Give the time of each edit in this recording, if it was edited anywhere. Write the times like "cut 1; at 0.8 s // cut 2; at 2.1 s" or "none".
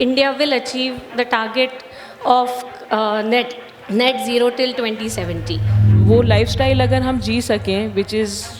cut 1; at 5.9 s